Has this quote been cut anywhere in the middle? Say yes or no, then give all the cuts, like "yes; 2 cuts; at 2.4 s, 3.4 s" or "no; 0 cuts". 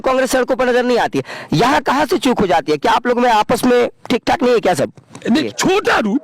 yes; 1 cut; at 5.3 s